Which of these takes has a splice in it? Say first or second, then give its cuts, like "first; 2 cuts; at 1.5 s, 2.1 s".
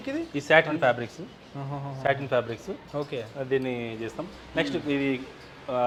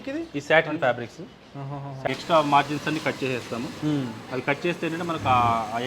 second; 1 cut; at 2.1 s